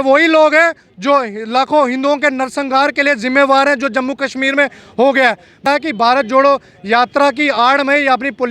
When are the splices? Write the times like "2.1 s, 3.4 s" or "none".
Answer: 5.7 s